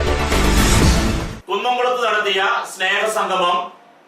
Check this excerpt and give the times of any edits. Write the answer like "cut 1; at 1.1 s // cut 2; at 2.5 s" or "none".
cut 1; at 1.3 s